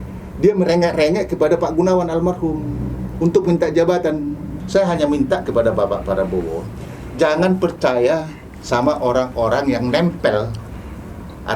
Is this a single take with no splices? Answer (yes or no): no